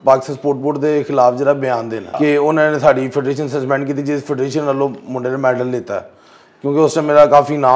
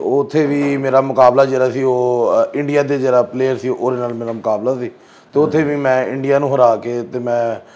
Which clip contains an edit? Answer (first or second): first